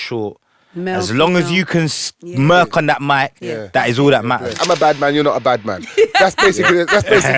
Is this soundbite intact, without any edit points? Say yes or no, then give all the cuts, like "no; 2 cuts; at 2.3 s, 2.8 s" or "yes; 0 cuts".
no; 1 cut; at 4.6 s